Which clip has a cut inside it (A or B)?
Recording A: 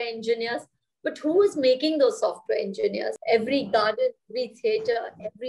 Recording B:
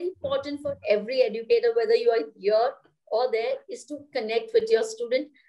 A